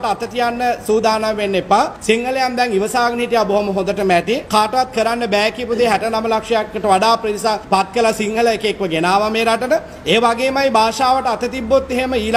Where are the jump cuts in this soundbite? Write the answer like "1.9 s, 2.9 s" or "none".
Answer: 2.0 s, 4.4 s, 7.6 s

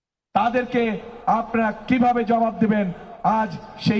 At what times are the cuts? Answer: none

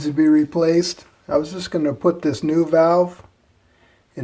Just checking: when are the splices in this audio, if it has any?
none

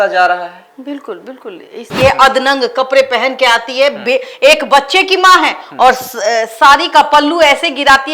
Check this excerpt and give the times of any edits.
1.9 s

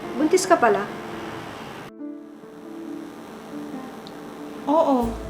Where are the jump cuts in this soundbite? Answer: none

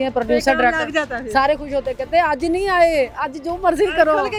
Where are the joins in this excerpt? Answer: none

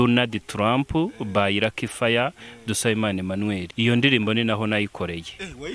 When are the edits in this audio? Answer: 3.7 s

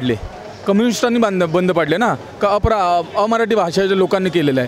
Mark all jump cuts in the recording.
none

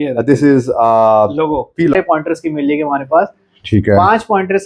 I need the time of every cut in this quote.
1.9 s

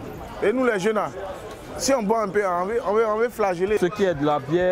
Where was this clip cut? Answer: 3.8 s

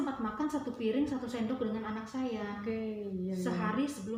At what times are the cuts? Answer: none

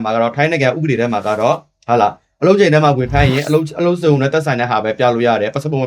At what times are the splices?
none

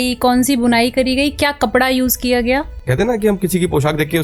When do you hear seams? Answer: 2.8 s

